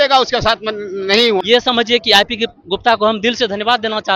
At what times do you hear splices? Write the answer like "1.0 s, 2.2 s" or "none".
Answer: 1.4 s